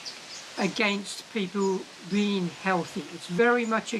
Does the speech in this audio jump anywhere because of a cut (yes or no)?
yes